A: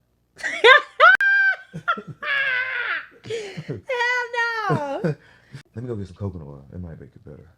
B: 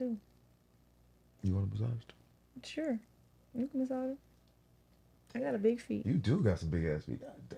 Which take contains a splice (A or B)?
A